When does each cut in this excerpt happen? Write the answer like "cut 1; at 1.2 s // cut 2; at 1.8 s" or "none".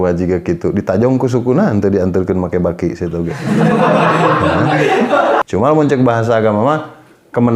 cut 1; at 5.4 s